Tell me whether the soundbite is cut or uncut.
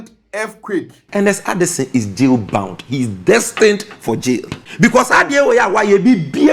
cut